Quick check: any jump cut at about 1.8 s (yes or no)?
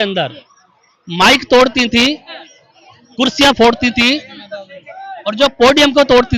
no